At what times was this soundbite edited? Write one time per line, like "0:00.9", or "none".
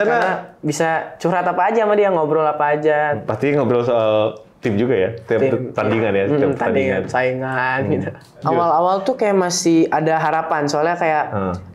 0:03.2
0:08.4

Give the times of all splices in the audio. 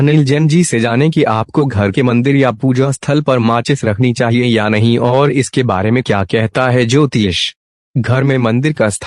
0:08.0

